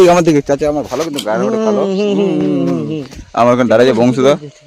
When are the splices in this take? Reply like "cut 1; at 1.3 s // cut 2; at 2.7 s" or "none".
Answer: none

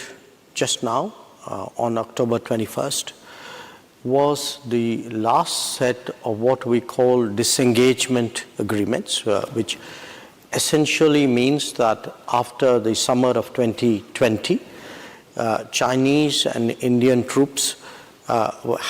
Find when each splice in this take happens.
none

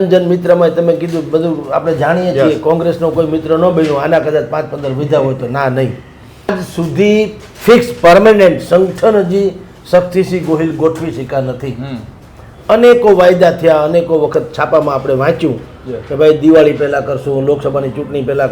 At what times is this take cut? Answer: cut 1; at 6.6 s

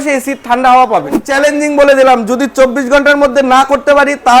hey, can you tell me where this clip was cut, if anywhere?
cut 1; at 1.3 s

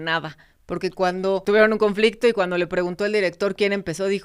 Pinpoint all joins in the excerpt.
cut 1; at 1.4 s

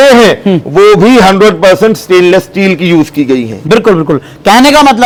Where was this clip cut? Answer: none

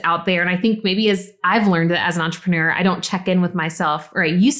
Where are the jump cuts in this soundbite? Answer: none

